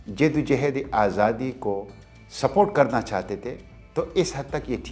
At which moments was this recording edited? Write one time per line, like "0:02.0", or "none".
none